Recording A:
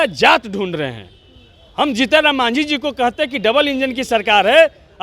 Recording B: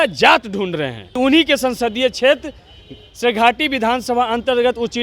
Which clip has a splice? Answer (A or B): B